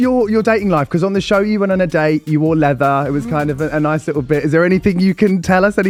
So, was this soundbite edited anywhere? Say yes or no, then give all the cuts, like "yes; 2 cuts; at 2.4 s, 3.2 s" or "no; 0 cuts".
no; 0 cuts